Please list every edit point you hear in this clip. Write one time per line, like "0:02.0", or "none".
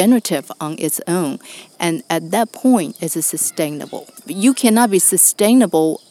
0:04.2